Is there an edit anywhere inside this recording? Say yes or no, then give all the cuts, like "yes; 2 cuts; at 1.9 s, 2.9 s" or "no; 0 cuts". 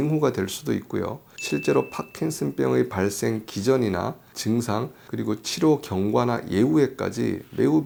no; 0 cuts